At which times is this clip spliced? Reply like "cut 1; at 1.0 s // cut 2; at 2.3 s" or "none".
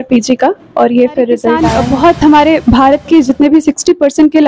cut 1; at 1.7 s